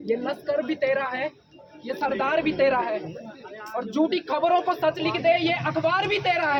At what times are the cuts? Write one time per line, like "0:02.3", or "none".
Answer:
none